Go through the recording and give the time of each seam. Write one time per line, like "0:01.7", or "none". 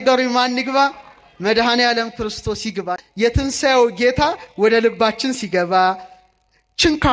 0:03.1